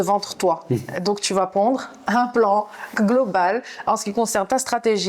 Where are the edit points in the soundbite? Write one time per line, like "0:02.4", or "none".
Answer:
none